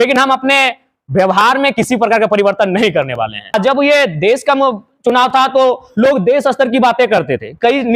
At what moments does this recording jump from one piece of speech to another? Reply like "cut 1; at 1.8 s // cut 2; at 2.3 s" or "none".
cut 1; at 3.5 s